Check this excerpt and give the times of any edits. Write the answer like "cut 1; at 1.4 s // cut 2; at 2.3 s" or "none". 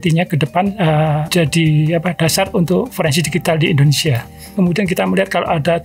cut 1; at 4.5 s